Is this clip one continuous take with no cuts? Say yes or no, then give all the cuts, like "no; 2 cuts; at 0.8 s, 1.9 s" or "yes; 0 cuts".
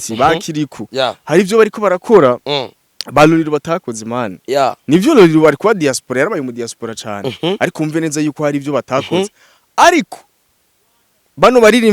yes; 0 cuts